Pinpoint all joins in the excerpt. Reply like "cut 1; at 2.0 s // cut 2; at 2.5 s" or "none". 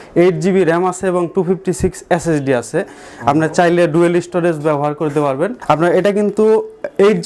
cut 1; at 5.6 s